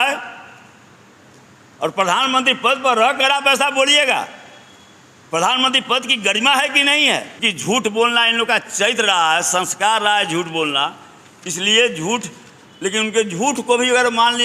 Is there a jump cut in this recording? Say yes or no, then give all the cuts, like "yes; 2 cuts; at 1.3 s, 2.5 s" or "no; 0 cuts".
yes; 1 cut; at 7.4 s